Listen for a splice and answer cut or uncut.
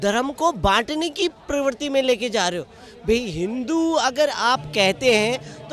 uncut